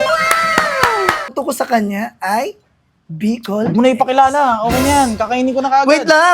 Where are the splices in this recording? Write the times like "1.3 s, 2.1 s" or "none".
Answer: 1.3 s